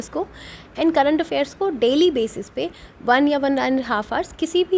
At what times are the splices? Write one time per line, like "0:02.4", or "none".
none